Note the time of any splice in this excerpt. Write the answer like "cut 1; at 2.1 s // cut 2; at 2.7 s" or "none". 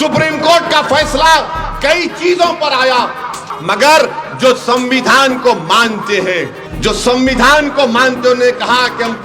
cut 1; at 3.5 s // cut 2; at 6.6 s